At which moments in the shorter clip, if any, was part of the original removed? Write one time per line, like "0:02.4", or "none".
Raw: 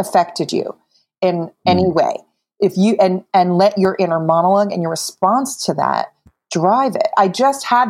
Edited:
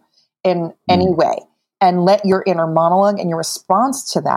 0:01.7